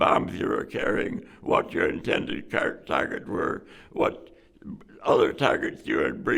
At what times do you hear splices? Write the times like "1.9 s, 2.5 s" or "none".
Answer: none